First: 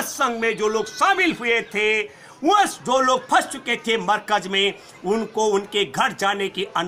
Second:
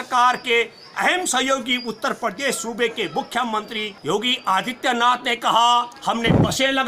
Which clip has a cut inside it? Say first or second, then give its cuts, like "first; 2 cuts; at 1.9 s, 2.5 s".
second; 1 cut; at 3.9 s